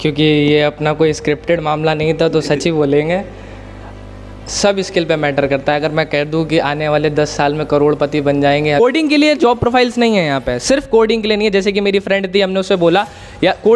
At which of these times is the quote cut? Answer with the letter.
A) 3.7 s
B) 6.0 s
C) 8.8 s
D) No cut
C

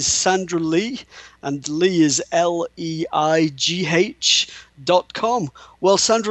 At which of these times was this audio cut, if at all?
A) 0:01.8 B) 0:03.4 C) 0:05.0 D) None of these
B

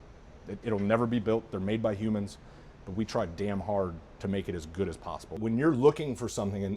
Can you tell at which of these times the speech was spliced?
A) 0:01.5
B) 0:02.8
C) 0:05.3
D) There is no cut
C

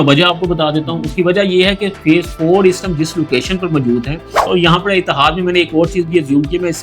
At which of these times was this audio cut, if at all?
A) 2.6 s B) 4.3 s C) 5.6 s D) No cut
B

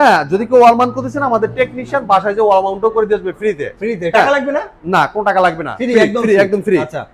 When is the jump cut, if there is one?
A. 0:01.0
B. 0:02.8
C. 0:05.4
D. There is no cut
D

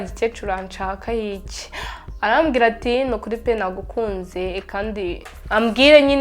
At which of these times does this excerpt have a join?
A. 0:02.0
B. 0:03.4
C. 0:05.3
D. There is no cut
C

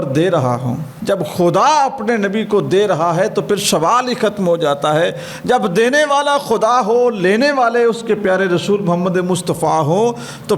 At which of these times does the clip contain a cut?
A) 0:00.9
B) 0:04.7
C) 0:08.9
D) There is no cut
A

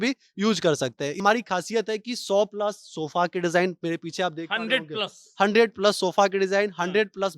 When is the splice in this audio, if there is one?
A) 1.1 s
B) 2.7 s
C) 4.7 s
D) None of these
A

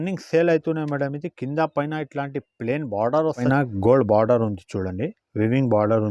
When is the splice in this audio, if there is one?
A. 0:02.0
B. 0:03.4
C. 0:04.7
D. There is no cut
B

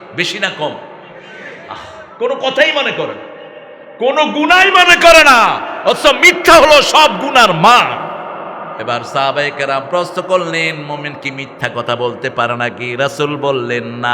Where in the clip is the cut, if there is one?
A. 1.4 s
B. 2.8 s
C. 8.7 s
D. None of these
C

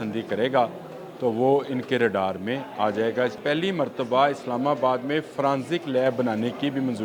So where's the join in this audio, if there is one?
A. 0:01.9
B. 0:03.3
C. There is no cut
B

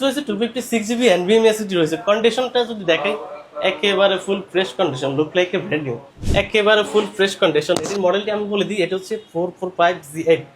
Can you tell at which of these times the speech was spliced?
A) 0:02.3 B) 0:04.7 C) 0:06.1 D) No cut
C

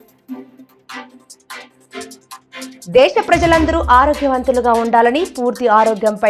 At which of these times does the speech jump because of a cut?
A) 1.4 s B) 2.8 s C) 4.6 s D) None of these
B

